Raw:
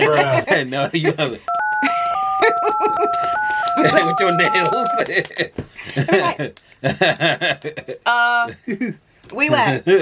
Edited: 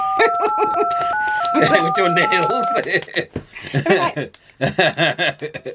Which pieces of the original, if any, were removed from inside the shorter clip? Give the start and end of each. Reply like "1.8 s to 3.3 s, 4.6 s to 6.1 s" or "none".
none